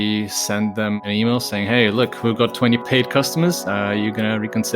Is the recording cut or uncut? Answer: cut